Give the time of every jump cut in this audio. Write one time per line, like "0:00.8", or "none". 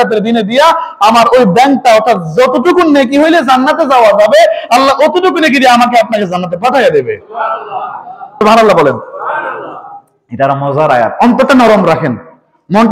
0:08.2